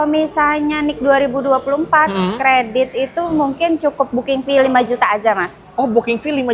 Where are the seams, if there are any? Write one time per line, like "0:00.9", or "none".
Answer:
none

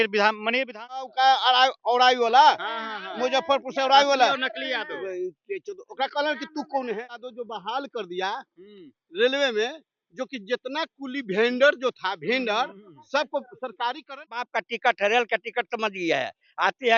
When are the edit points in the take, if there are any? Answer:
0:01.1
0:07.4
0:14.5

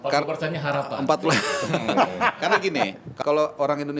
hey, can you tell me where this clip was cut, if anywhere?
0:03.1

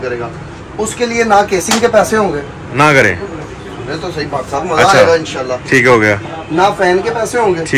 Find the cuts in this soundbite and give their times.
none

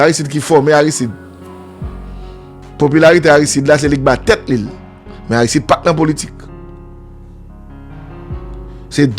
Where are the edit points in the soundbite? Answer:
0:01.1
0:02.5

